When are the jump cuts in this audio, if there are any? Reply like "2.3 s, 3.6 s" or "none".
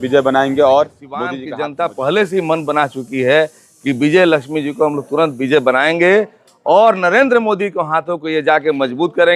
1.4 s